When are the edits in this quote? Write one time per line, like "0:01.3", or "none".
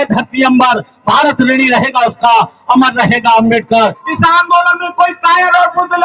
0:04.0